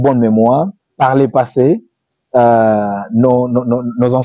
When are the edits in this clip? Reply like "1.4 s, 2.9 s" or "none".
none